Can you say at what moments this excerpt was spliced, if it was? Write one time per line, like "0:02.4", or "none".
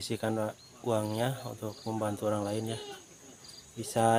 none